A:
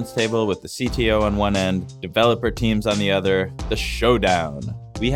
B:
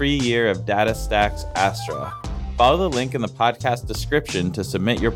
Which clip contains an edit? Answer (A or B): A